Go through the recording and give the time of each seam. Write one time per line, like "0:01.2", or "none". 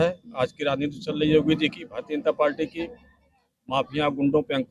none